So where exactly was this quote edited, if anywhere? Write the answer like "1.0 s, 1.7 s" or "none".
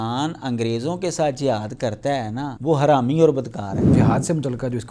2.5 s, 3.8 s